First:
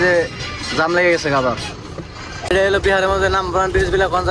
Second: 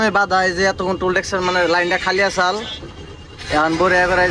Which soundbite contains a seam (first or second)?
first